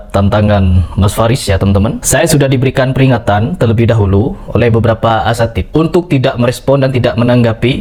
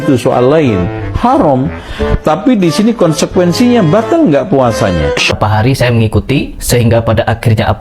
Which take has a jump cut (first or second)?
second